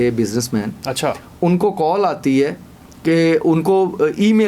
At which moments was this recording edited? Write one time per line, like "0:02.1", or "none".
none